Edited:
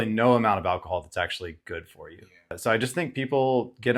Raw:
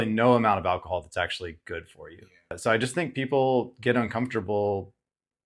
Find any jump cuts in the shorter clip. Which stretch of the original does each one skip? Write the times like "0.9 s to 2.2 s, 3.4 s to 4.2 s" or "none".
none